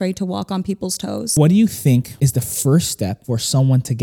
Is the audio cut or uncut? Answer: cut